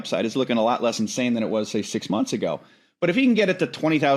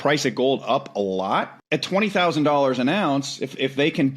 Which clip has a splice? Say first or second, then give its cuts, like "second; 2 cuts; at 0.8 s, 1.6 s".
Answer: second; 1 cut; at 1.6 s